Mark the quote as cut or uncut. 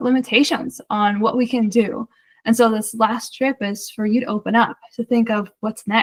uncut